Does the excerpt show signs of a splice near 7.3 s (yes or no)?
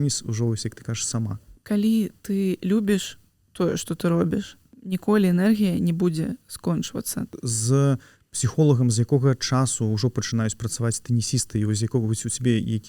yes